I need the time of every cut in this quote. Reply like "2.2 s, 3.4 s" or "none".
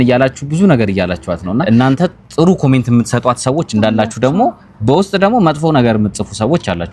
1.6 s